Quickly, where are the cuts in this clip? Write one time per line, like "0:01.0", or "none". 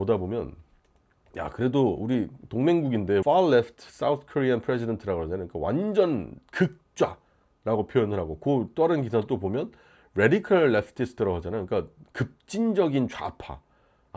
0:03.2